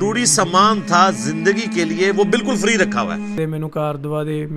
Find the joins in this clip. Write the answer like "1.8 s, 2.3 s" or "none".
3.4 s